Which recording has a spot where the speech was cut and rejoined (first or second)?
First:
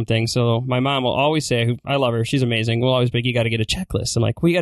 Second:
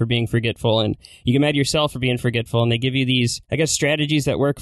second